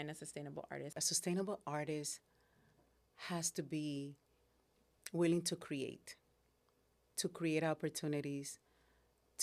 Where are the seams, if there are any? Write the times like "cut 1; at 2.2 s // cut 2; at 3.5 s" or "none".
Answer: cut 1; at 0.9 s